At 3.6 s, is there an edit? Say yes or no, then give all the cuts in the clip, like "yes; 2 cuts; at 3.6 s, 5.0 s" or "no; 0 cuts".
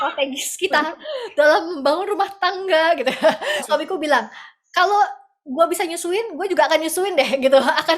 yes; 1 cut; at 3.6 s